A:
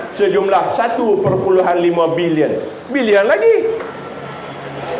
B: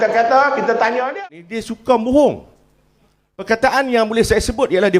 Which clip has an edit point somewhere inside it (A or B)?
B